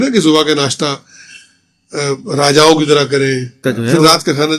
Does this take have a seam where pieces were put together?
yes; 1 cut; at 3.6 s

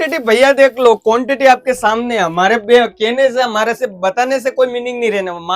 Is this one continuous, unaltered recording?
yes; 0 cuts

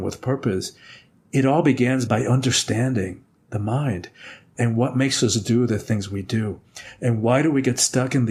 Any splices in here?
no; 0 cuts

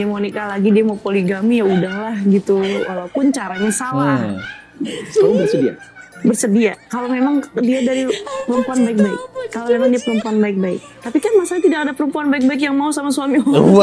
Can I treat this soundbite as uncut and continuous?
yes; 0 cuts

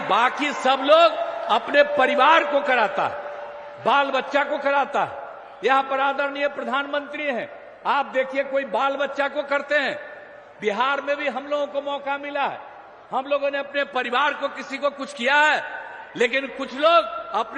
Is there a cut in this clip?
no; 0 cuts

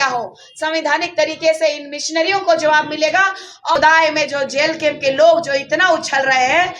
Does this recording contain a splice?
yes; 1 cut; at 3.8 s

